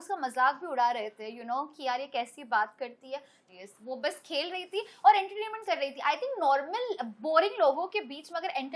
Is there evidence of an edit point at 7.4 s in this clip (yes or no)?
no